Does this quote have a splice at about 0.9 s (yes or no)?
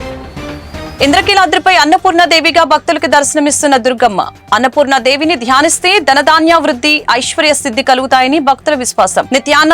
yes